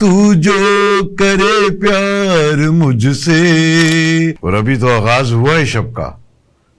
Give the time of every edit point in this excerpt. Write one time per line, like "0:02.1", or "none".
0:04.4